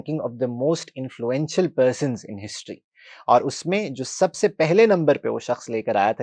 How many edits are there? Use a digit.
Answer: 0